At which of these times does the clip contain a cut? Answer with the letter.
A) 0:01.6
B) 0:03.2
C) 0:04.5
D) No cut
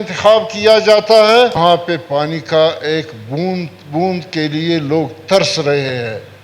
A